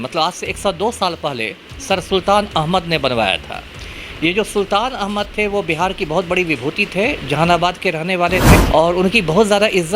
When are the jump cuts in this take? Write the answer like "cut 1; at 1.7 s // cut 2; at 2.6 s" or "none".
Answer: cut 1; at 8.6 s